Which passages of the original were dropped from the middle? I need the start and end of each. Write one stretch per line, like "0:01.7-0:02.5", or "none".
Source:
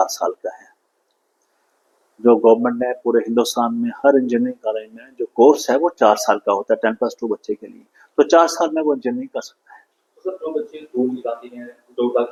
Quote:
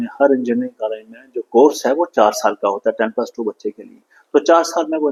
none